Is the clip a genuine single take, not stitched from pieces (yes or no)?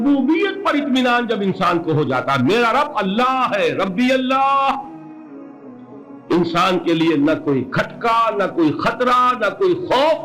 yes